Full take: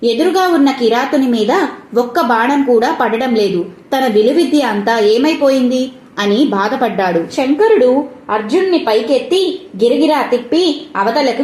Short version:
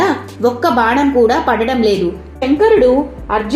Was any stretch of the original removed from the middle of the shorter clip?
yes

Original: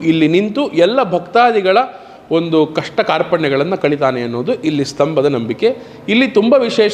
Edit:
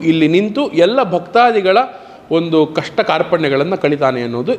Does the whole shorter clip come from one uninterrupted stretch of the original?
yes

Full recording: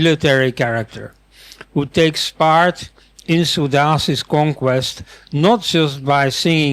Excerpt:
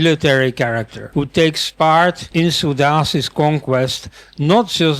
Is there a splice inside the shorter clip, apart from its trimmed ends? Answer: yes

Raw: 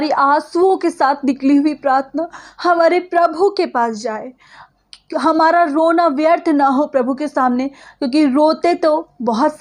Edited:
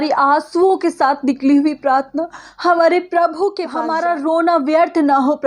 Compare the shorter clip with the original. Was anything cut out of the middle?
yes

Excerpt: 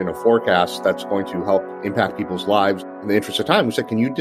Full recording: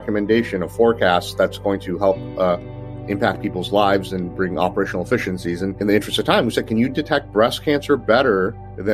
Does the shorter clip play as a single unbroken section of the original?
no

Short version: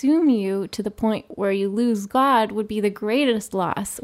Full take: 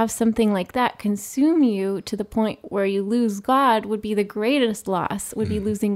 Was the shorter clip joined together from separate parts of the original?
no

